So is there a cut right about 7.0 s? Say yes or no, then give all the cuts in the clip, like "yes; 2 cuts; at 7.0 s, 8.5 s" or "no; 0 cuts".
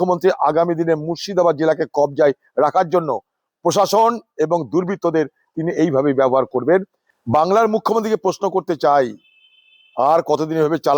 yes; 1 cut; at 7.0 s